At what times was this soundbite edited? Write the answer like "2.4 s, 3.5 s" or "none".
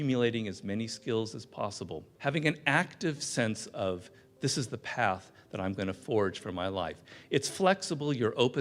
2.1 s